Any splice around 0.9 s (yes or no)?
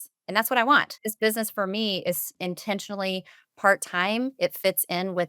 yes